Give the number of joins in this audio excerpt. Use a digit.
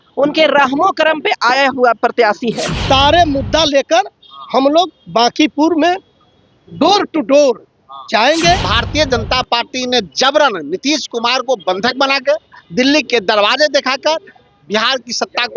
2